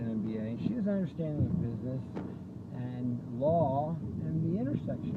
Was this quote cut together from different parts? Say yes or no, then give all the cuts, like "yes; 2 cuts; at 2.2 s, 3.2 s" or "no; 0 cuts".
yes; 1 cut; at 3.7 s